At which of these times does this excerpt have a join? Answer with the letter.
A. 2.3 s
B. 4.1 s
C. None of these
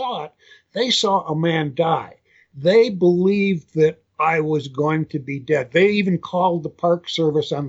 B